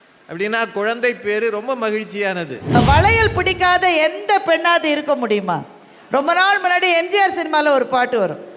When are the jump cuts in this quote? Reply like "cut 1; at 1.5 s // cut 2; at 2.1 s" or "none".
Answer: cut 1; at 2.8 s